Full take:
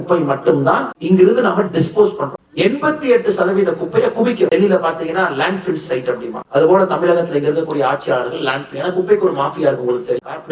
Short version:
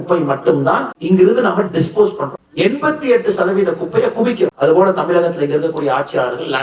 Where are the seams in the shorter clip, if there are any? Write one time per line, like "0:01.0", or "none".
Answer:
0:04.5